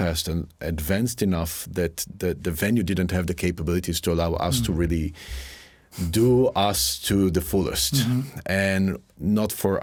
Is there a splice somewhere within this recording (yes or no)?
no